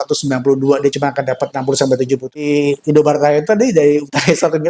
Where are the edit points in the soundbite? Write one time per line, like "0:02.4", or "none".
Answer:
0:02.4